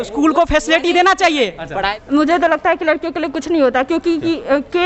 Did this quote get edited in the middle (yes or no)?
yes